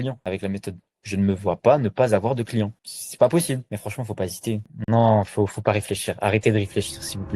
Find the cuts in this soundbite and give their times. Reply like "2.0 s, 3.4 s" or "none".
3.7 s

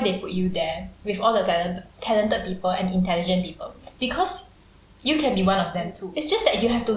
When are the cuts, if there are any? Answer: none

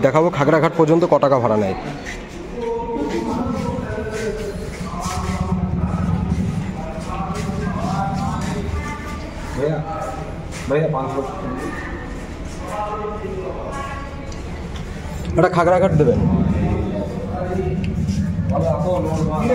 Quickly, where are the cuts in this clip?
none

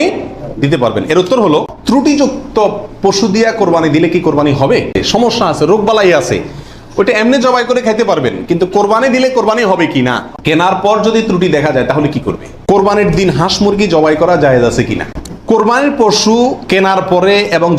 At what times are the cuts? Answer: 1.9 s, 5.0 s, 10.3 s, 12.7 s, 15.5 s

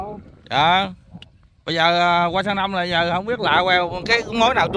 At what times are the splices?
none

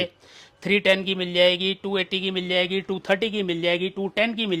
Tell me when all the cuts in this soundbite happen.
none

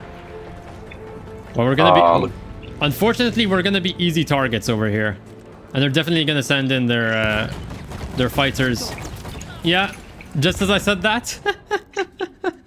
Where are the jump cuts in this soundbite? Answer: none

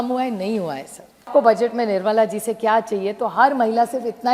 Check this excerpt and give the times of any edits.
1.3 s

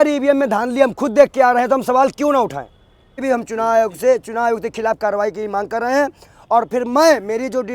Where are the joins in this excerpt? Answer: 3.2 s

